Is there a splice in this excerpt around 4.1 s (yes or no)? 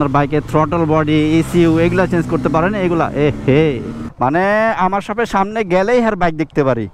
yes